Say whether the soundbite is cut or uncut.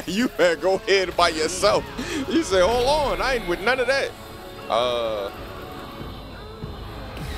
uncut